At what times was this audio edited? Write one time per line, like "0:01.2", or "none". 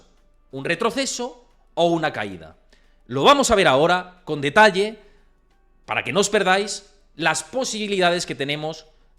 none